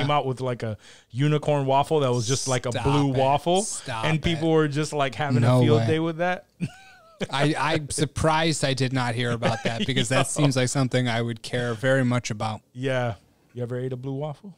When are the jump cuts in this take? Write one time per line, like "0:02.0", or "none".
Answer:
0:13.5